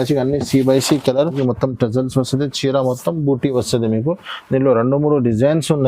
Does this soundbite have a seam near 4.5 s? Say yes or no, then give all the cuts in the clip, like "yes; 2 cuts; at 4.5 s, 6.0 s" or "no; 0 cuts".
no; 1 cut; at 1.3 s